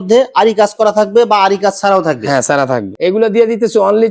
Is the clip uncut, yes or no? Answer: yes